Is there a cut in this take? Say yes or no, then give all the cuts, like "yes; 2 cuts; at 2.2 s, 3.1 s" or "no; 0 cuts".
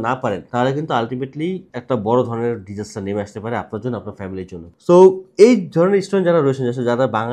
yes; 1 cut; at 4.7 s